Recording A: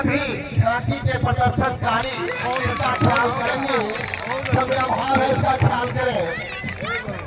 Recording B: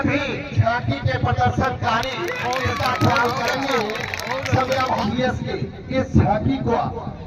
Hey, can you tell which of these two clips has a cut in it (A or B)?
B